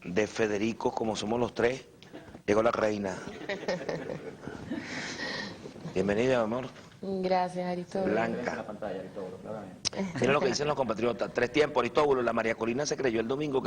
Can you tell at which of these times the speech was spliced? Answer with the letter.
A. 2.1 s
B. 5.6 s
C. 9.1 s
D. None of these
C